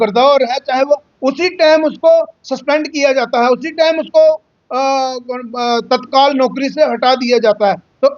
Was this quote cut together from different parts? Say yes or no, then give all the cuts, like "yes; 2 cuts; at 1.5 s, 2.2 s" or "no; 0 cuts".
yes; 1 cut; at 4.5 s